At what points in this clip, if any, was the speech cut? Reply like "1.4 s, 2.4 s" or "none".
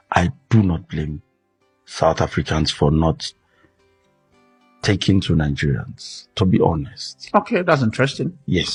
none